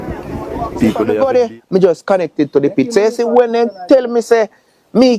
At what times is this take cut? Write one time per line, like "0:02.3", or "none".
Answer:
0:01.2